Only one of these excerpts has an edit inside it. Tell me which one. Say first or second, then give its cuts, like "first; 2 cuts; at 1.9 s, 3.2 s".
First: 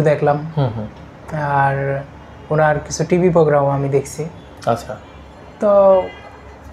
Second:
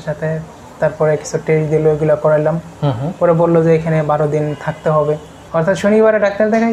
second; 1 cut; at 5.3 s